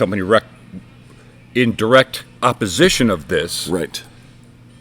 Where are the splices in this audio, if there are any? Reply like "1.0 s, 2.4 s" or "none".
2.3 s